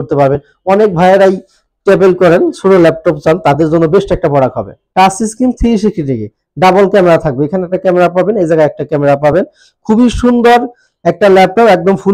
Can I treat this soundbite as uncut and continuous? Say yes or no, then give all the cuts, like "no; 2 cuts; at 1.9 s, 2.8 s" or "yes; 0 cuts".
no; 1 cut; at 4.8 s